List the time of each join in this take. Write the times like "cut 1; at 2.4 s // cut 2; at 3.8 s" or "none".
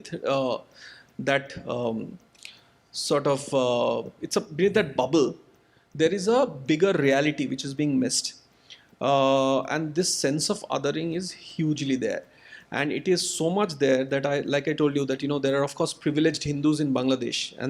none